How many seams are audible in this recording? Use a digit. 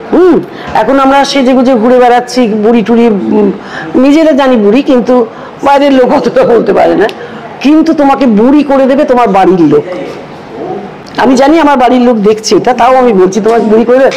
0